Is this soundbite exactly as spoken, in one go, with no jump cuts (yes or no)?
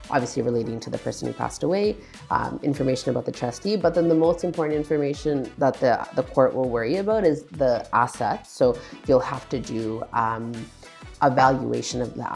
yes